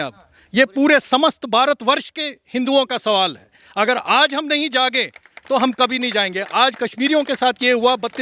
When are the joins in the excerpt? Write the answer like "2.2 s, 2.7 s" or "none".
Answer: none